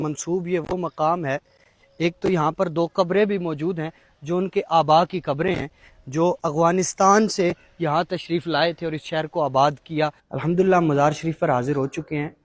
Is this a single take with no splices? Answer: no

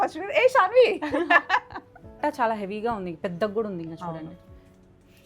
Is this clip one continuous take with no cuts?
no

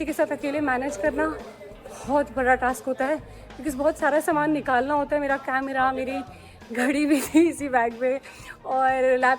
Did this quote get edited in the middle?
no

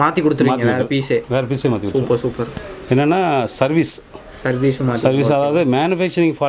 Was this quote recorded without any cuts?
yes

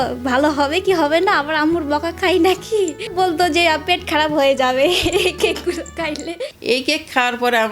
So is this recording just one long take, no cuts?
no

